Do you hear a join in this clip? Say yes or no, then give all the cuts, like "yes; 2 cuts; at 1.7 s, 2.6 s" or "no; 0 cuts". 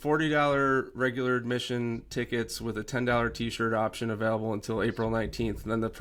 no; 0 cuts